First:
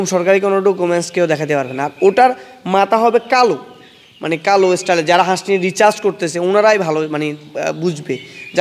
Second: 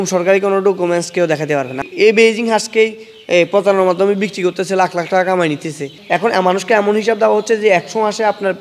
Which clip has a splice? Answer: second; 2 cuts; at 1.8 s, 5.9 s

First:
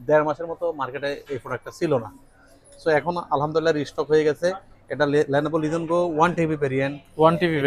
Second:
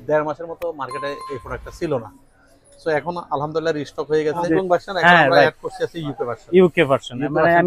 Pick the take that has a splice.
second; 1 cut; at 4.5 s

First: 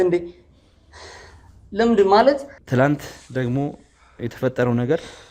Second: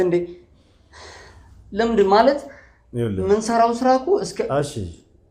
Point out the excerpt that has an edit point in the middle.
first; 1 cut; at 2.5 s

